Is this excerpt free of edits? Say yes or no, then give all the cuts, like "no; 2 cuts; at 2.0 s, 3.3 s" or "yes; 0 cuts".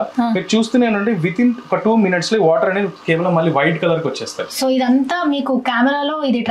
no; 1 cut; at 4.5 s